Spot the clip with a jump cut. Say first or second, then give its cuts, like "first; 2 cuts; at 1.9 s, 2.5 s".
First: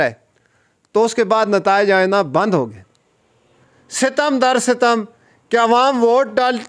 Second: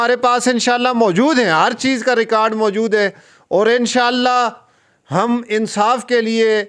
first; 1 cut; at 3.6 s